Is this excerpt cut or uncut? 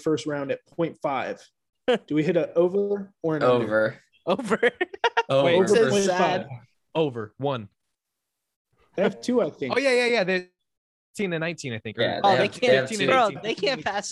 uncut